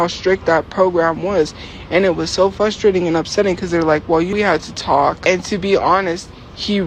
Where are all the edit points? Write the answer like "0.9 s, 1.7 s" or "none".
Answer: none